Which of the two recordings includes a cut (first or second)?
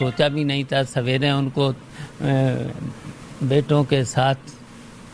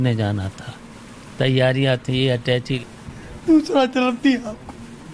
second